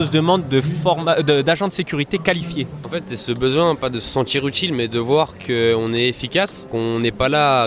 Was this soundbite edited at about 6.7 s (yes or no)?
yes